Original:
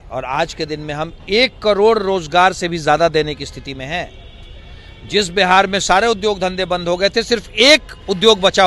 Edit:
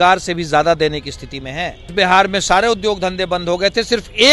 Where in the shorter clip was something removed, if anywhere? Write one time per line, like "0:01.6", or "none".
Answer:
0:01.9